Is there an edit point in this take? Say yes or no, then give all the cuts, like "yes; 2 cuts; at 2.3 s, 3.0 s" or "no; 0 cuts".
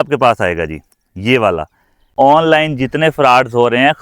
yes; 1 cut; at 2.1 s